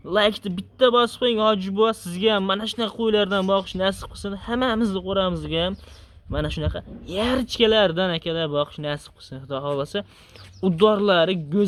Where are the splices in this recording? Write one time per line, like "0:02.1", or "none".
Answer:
none